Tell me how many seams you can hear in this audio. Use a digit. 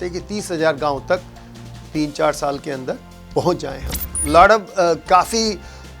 1